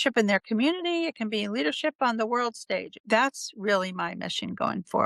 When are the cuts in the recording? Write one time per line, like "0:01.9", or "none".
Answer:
0:02.9